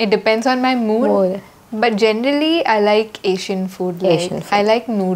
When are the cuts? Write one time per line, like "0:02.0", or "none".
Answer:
none